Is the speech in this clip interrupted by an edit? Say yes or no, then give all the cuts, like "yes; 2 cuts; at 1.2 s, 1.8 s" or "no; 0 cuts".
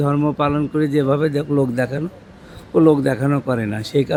no; 0 cuts